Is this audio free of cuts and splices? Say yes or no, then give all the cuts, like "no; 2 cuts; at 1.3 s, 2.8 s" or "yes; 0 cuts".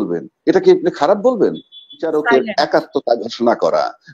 no; 1 cut; at 2.0 s